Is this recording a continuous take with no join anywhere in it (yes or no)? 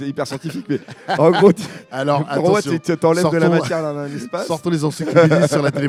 yes